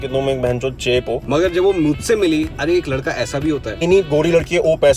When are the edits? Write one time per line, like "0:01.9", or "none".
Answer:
0:01.2
0:02.5
0:03.8